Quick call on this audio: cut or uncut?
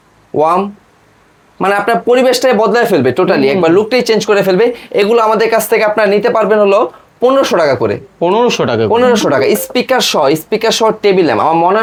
uncut